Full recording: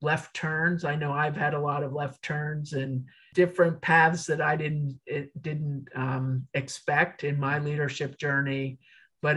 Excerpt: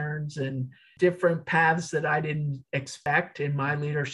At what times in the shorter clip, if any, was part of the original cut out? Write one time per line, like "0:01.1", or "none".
0:02.9